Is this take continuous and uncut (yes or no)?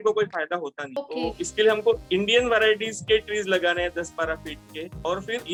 yes